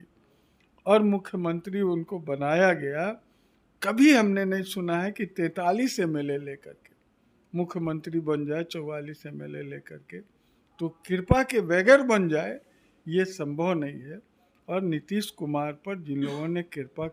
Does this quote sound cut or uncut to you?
uncut